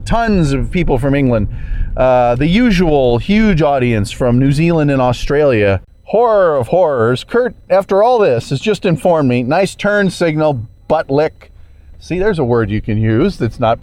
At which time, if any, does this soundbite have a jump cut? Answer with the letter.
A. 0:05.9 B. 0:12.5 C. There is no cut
A